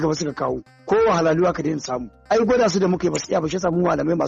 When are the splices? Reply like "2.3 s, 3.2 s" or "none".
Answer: none